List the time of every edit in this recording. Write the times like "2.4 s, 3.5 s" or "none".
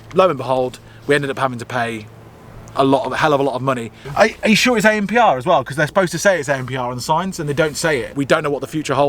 4.0 s, 8.1 s